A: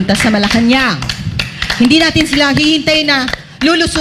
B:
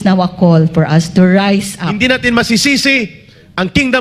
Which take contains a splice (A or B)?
B